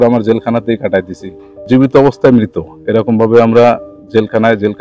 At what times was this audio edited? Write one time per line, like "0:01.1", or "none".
0:01.6